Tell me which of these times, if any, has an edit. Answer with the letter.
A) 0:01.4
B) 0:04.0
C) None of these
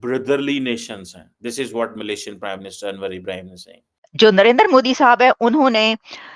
B